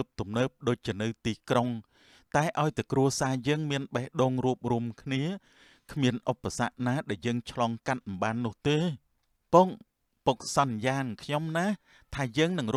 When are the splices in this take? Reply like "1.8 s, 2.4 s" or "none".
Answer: none